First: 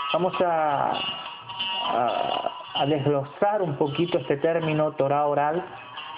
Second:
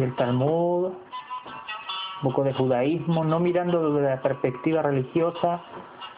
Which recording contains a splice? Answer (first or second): second